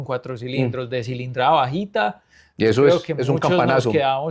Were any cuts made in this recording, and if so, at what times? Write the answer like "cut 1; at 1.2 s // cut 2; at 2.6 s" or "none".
none